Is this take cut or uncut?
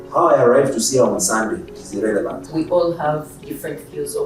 cut